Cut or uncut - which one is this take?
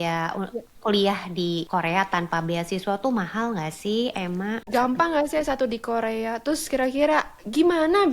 cut